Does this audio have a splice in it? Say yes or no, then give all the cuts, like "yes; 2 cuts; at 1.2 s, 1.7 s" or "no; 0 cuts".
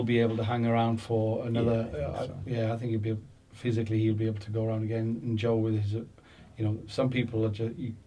no; 0 cuts